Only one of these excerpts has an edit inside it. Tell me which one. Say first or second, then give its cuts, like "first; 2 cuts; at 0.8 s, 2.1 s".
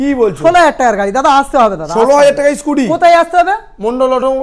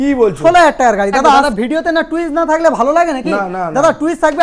second; 1 cut; at 1.5 s